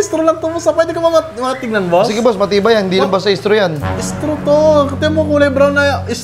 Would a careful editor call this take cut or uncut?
uncut